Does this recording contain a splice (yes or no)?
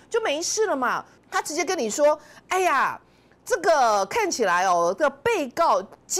yes